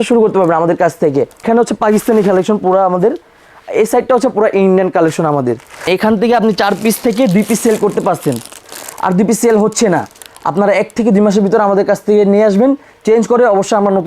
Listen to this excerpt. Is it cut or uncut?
cut